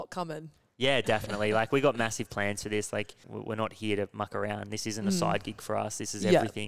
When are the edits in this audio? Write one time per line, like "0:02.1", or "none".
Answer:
0:03.3